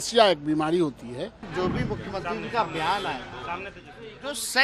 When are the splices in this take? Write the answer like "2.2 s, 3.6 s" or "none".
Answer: 1.5 s